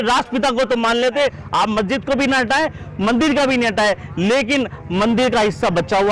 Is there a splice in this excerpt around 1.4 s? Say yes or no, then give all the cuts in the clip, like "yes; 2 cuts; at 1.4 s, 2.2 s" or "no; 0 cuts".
yes; 1 cut; at 1.4 s